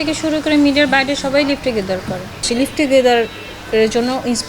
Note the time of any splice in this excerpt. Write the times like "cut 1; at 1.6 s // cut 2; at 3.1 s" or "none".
cut 1; at 2.4 s